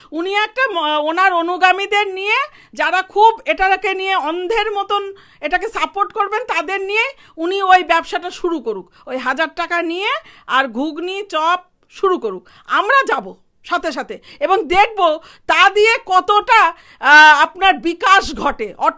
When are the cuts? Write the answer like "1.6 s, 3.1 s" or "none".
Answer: none